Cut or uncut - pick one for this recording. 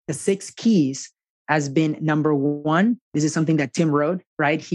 uncut